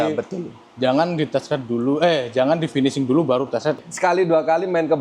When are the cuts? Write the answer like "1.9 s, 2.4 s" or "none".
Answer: 3.8 s